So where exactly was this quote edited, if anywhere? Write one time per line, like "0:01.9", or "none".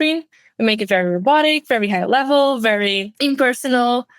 0:03.1